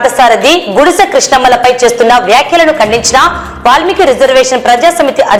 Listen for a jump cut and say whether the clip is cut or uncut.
uncut